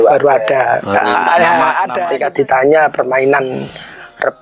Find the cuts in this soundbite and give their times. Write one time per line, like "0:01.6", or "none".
0:01.9